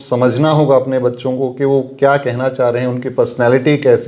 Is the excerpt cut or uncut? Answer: uncut